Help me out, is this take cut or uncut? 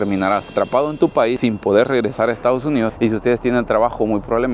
cut